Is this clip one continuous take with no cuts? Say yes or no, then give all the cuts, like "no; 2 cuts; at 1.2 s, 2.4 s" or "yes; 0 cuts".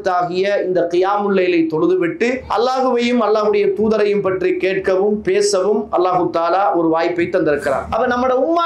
no; 2 cuts; at 2.4 s, 7.8 s